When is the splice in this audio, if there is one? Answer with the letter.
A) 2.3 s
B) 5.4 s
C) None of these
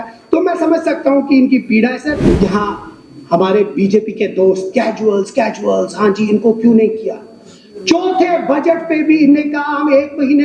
A